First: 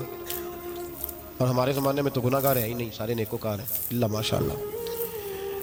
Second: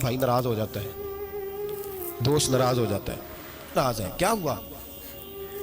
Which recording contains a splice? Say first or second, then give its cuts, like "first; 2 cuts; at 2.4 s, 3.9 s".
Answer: second; 1 cut; at 3.6 s